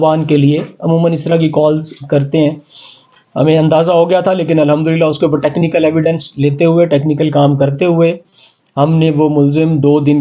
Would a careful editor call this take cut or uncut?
uncut